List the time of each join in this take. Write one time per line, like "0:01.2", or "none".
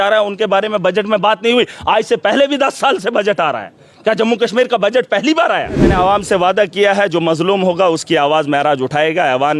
0:05.9